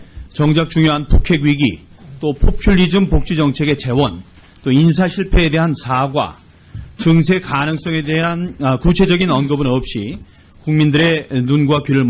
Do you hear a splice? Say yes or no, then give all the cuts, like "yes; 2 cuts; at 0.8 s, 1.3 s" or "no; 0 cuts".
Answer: no; 0 cuts